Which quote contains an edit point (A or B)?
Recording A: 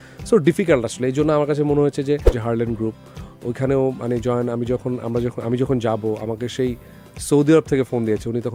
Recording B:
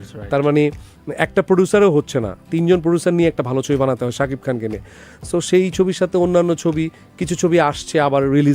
A